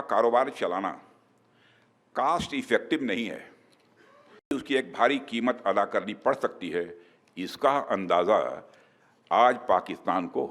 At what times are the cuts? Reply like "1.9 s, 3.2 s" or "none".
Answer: 4.5 s